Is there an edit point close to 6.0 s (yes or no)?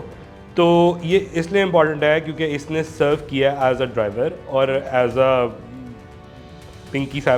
no